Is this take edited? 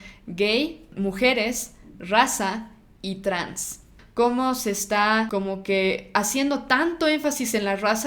yes; 3 cuts; at 0.9 s, 3.9 s, 5.3 s

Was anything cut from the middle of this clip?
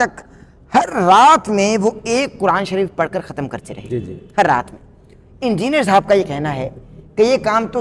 no; 0 cuts

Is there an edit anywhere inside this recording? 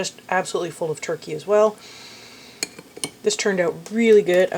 no; 0 cuts

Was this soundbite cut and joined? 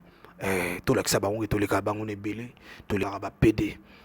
yes; 1 cut; at 3.1 s

